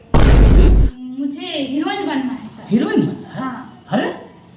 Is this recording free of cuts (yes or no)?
no